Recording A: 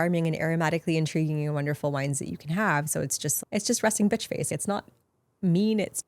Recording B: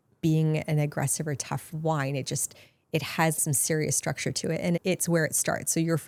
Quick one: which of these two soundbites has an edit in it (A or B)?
A